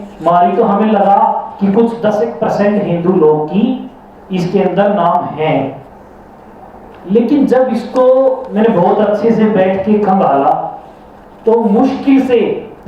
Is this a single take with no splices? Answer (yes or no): yes